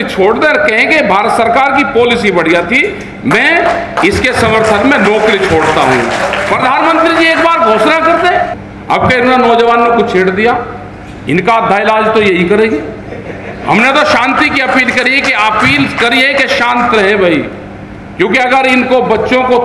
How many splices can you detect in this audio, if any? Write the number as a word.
one